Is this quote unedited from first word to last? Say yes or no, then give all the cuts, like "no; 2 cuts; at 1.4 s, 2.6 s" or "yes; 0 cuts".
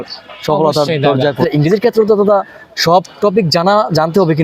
no; 1 cut; at 1.4 s